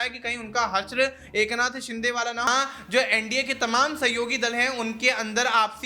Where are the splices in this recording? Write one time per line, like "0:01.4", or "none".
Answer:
0:02.5